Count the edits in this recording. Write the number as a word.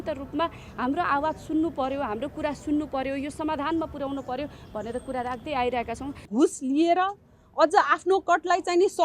one